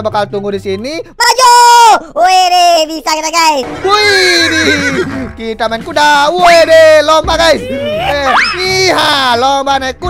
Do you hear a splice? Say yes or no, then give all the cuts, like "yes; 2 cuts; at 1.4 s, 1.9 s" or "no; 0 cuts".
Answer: yes; 1 cut; at 3.7 s